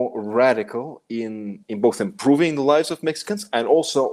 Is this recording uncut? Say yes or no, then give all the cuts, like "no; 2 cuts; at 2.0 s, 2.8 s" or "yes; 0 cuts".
yes; 0 cuts